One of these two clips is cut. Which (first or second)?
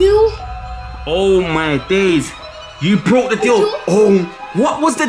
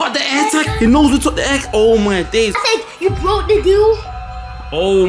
second